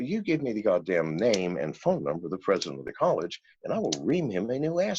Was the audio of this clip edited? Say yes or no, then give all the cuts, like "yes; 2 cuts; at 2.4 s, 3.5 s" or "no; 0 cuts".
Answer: no; 0 cuts